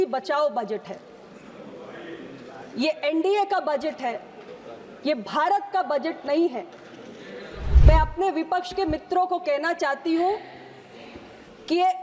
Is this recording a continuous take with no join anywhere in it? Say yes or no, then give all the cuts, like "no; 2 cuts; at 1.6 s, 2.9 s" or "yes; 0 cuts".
no; 1 cut; at 7.7 s